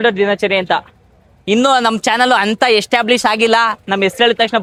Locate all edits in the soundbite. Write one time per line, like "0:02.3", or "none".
none